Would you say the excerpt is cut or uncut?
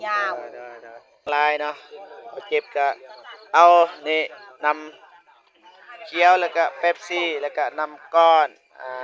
cut